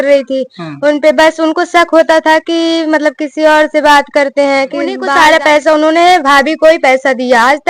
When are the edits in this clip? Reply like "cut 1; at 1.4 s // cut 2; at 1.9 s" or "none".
cut 1; at 5.0 s